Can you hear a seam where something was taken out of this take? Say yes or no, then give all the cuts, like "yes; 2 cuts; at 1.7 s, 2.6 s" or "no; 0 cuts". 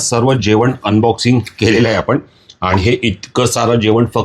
no; 0 cuts